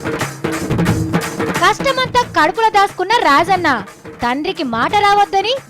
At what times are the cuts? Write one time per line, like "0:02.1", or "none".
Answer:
0:00.9